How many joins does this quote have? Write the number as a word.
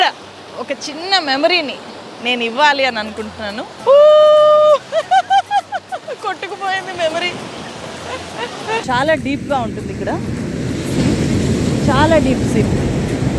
two